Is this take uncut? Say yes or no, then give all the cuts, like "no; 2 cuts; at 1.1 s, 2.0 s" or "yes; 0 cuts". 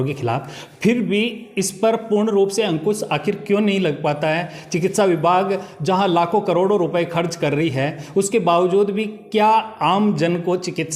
yes; 0 cuts